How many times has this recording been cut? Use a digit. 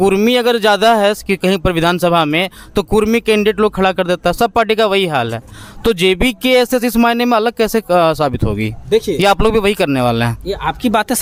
0